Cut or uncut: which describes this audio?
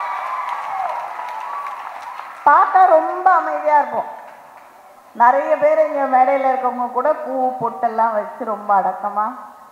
uncut